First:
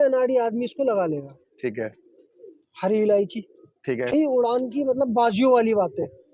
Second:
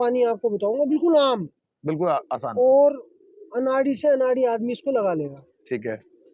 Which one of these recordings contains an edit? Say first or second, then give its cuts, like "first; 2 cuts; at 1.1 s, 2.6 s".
first; 1 cut; at 4.1 s